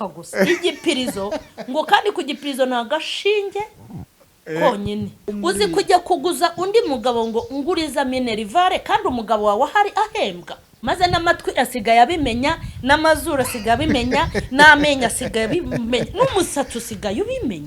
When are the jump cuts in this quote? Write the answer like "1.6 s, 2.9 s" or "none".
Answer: 5.3 s, 10.7 s